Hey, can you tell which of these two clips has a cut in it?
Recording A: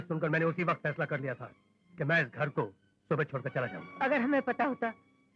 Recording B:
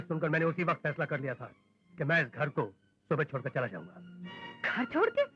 A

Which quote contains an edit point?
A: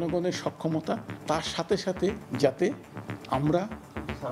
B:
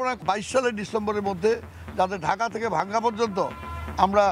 A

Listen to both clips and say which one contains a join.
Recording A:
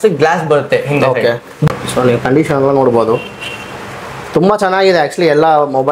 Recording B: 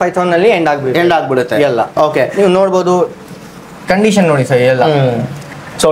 A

